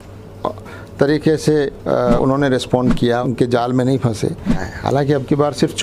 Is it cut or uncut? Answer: cut